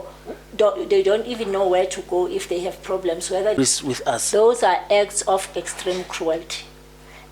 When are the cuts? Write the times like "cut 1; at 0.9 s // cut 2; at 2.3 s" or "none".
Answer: cut 1; at 3.6 s